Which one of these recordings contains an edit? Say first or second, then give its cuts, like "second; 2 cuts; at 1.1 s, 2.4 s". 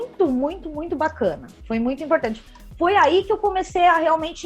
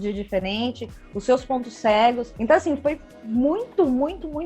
second; 1 cut; at 2.3 s